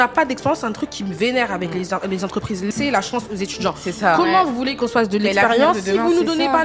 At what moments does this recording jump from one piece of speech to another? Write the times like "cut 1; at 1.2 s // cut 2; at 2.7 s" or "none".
cut 1; at 2.7 s